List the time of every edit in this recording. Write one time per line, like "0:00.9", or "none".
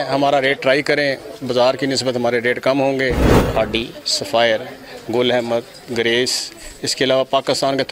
0:03.3